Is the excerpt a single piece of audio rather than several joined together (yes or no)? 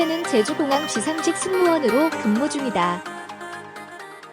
no